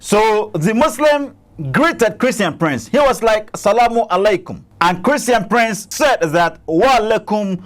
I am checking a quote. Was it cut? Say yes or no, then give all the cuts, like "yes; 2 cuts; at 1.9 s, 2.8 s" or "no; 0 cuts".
yes; 2 cuts; at 4.6 s, 5.9 s